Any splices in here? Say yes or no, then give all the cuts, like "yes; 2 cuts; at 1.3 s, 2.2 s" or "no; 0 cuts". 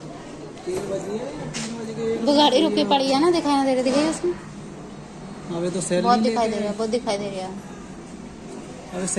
no; 0 cuts